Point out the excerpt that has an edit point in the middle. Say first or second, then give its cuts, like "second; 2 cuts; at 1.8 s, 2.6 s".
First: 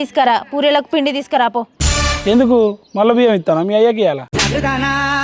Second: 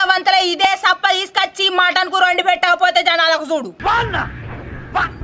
first; 1 cut; at 1.8 s